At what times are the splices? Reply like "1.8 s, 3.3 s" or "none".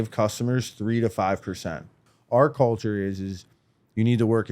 2.1 s